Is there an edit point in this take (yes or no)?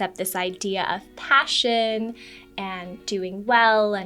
no